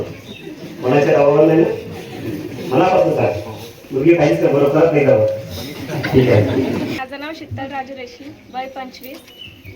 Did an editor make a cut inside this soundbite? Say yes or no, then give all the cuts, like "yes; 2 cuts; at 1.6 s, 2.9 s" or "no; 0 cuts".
yes; 1 cut; at 7.0 s